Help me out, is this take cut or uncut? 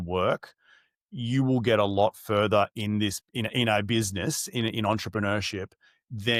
uncut